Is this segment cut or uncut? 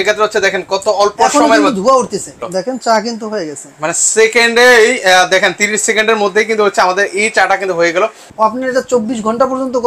cut